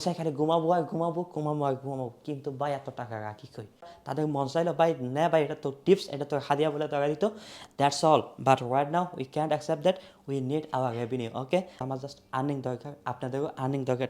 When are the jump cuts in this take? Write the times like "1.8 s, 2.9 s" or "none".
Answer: 4.0 s, 11.8 s